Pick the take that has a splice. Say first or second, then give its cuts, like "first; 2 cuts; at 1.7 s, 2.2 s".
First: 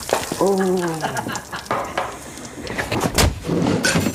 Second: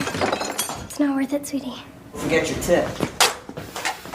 second; 1 cut; at 2.2 s